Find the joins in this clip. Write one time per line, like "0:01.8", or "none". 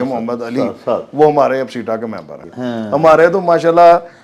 0:02.4